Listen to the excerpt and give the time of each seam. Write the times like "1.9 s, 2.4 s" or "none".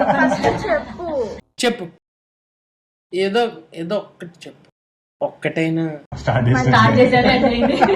6.1 s